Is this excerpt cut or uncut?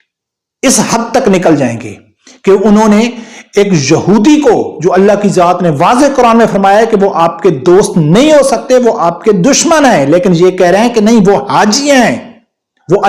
uncut